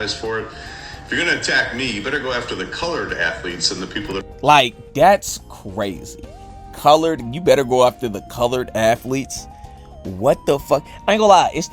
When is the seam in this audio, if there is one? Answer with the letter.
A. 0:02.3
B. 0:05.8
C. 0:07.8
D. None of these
A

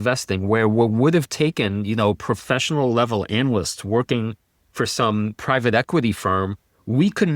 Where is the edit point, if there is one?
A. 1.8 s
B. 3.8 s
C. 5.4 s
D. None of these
C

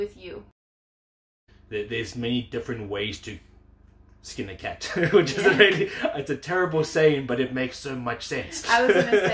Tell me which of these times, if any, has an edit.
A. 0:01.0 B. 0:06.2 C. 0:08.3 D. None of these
A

